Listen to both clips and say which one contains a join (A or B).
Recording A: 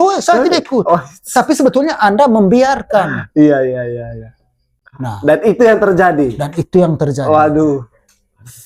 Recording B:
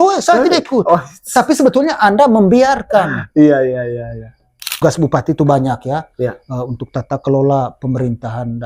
B